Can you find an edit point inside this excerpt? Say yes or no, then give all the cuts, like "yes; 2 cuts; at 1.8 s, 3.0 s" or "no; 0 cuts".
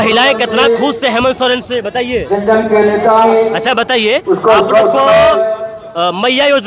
yes; 1 cut; at 3.3 s